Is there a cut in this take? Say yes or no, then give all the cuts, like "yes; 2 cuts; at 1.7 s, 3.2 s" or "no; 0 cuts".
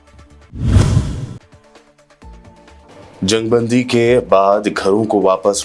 yes; 1 cut; at 2.9 s